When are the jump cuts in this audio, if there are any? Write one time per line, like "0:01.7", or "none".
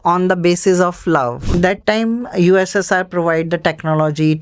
0:01.5